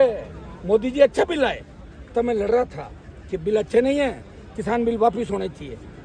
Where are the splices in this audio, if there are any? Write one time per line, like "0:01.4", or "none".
none